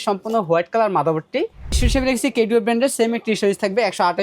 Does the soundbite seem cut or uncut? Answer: cut